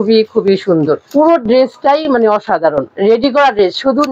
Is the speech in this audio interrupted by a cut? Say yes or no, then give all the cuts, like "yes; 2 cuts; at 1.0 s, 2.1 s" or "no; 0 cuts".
yes; 2 cuts; at 1.0 s, 2.9 s